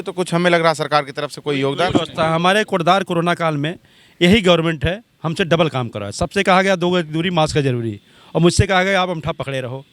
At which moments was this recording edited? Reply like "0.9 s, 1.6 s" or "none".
none